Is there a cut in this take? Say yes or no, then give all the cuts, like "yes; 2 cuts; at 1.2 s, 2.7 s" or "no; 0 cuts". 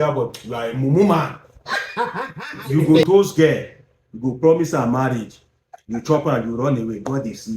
yes; 1 cut; at 2.6 s